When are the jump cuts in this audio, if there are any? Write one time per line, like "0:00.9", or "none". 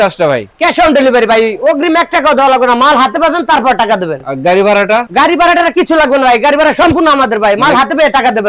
none

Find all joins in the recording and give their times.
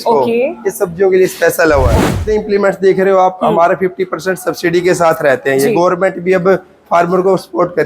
0:02.1

